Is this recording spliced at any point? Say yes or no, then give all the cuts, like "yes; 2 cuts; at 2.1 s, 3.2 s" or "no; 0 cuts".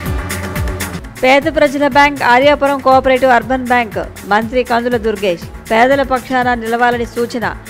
yes; 1 cut; at 0.9 s